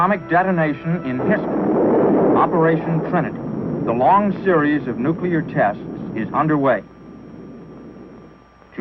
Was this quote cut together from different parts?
yes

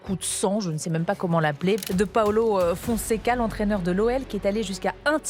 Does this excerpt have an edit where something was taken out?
no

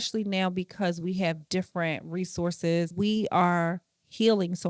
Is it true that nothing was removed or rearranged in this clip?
no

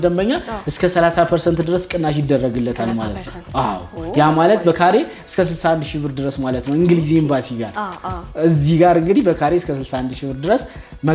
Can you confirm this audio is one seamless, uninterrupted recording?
yes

